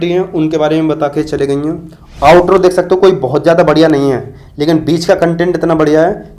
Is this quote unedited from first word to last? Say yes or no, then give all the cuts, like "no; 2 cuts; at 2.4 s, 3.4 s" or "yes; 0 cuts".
no; 1 cut; at 1.8 s